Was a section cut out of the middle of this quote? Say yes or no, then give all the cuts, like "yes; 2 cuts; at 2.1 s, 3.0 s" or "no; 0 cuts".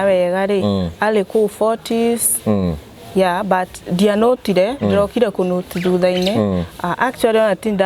no; 0 cuts